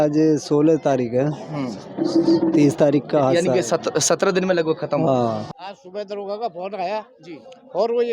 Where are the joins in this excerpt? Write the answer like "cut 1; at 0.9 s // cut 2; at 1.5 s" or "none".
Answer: cut 1; at 5.5 s